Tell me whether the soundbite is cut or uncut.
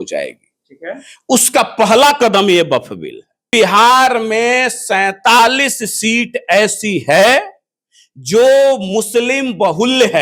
cut